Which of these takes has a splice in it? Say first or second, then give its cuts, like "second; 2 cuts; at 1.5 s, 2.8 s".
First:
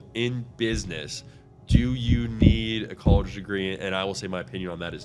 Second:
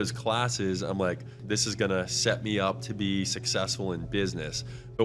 second; 1 cut; at 1.4 s